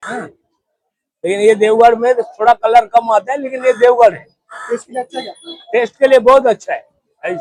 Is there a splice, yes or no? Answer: no